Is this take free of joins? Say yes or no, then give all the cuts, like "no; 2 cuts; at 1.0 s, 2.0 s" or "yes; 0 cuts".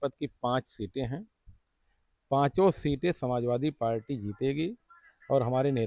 yes; 0 cuts